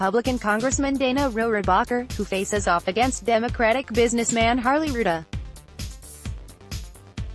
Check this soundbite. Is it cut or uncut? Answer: cut